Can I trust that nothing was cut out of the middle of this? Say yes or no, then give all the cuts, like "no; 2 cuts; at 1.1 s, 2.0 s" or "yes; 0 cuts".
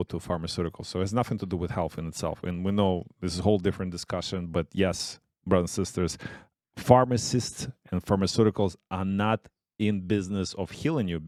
yes; 0 cuts